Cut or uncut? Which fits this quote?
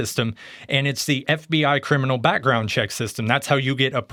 uncut